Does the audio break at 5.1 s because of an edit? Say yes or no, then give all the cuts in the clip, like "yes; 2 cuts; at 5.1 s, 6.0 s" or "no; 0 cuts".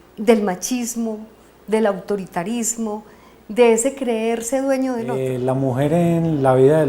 yes; 1 cut; at 5.1 s